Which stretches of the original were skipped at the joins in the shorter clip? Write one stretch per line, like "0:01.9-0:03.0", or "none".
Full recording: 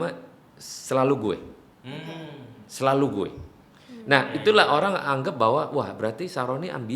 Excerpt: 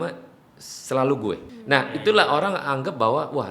0:01.5-0:03.9